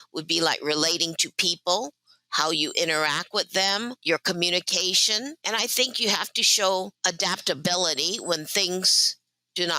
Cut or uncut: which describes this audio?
cut